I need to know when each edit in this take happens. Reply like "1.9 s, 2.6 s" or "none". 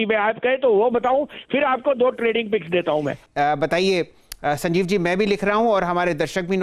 3.2 s